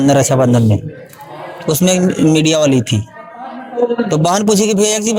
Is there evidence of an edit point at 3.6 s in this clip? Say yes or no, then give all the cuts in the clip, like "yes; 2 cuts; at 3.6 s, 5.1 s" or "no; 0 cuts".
no; 0 cuts